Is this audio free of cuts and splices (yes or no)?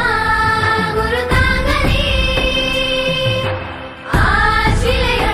yes